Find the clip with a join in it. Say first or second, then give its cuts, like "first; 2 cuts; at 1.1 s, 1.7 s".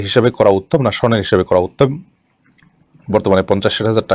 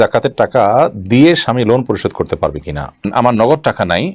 second; 1 cut; at 3.1 s